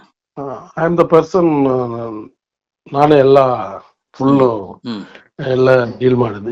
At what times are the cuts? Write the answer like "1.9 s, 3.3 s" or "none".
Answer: none